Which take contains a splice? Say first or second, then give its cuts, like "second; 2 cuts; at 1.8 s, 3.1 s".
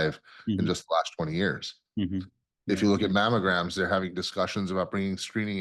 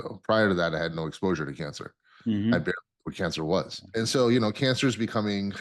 second; 1 cut; at 3.8 s